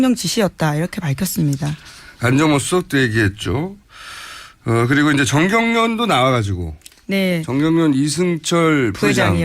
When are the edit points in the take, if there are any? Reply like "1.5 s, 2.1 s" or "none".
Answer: 6.2 s